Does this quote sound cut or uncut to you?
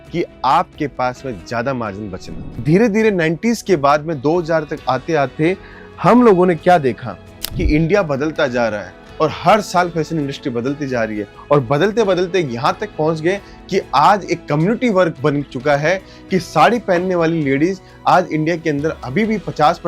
cut